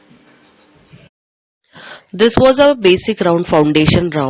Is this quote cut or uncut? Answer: cut